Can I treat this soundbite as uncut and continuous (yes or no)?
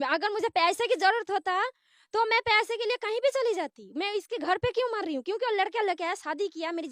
yes